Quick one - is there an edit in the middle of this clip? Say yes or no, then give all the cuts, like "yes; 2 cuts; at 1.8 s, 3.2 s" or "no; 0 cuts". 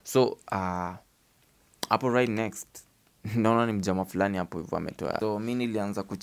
yes; 1 cut; at 5.2 s